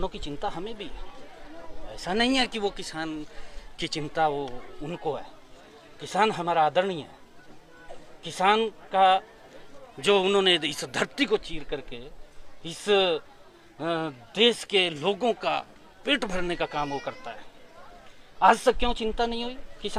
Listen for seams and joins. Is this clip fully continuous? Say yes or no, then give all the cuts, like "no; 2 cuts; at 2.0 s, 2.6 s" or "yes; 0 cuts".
yes; 0 cuts